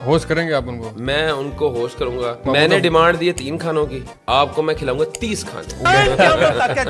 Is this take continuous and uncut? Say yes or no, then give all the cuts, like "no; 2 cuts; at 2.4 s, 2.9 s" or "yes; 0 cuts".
no; 1 cut; at 5.9 s